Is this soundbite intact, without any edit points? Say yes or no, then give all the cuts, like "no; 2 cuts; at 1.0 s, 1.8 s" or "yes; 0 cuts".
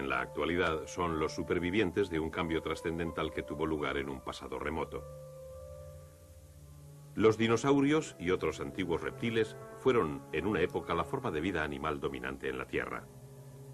no; 1 cut; at 3.5 s